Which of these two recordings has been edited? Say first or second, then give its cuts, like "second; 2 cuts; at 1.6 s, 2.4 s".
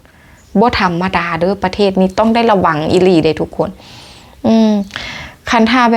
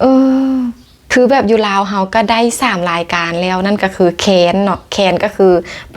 second; 1 cut; at 1.1 s